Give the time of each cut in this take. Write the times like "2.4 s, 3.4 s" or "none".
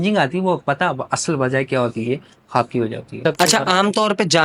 3.1 s